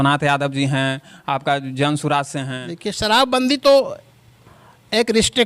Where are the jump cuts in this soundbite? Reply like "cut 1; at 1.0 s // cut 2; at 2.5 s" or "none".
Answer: cut 1; at 2.6 s